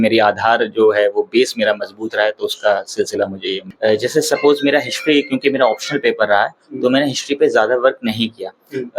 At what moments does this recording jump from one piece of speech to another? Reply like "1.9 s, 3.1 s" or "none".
3.6 s